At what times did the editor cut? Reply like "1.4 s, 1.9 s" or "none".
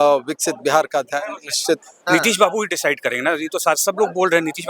1.9 s